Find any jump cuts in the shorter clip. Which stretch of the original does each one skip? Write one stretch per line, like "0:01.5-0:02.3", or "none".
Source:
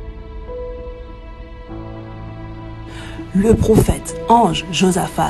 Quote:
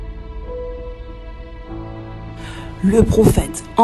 0:02.8-0:03.3